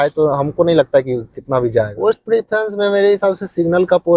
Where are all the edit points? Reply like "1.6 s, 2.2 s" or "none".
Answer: 1.9 s